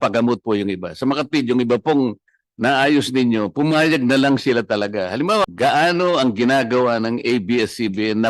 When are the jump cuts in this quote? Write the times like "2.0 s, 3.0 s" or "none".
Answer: 5.4 s